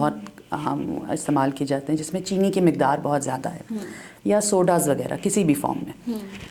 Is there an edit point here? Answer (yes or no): no